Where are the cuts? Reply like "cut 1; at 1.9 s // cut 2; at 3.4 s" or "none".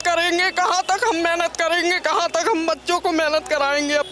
none